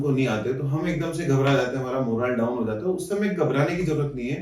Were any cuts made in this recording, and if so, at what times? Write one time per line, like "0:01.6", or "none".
none